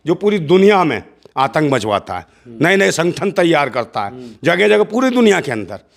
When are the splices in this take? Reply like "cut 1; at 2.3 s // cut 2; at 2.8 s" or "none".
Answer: none